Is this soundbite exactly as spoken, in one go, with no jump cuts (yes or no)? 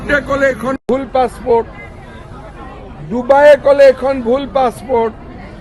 yes